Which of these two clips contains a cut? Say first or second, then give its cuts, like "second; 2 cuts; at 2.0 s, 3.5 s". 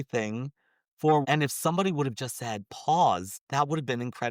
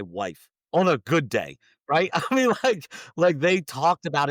first; 2 cuts; at 1.2 s, 3.3 s